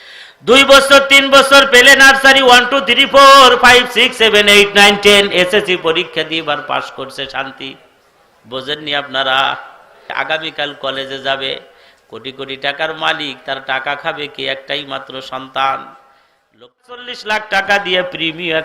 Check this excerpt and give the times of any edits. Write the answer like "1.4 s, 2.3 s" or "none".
10.1 s, 17.0 s